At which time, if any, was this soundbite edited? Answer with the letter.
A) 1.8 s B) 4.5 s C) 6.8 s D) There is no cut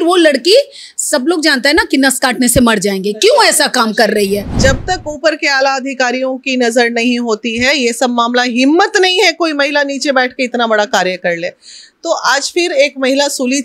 B